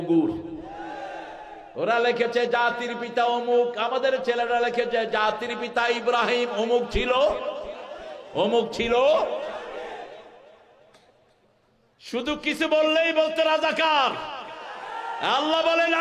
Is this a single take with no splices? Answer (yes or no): yes